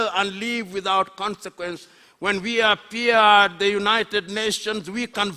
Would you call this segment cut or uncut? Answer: cut